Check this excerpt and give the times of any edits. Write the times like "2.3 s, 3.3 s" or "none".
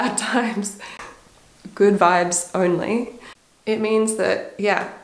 none